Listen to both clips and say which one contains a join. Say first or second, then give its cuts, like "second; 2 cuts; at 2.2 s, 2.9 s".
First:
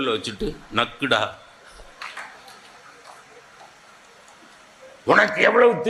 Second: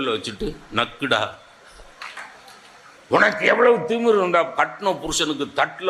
second; 1 cut; at 3.0 s